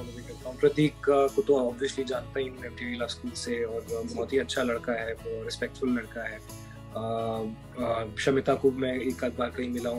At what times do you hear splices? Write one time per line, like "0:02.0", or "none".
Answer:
none